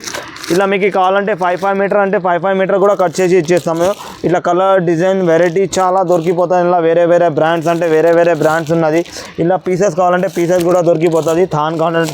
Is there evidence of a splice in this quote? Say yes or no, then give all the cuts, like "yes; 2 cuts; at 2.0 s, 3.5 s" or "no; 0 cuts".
no; 0 cuts